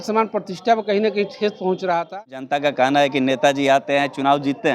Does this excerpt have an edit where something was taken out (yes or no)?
yes